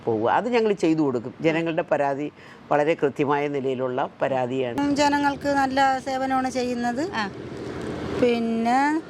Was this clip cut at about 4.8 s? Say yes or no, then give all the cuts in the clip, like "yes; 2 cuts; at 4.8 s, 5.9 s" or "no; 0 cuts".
yes; 1 cut; at 4.8 s